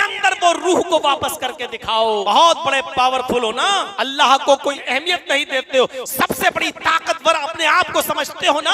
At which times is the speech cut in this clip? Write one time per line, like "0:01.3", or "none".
0:02.2
0:03.9
0:04.8